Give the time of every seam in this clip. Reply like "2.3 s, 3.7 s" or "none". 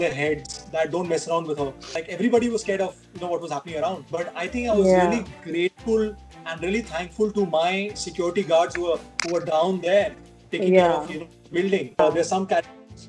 1.9 s, 12.0 s